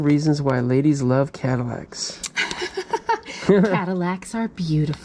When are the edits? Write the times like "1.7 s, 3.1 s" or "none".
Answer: none